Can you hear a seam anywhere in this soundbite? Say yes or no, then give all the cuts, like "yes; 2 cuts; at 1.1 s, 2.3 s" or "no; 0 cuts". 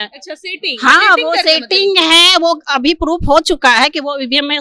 no; 0 cuts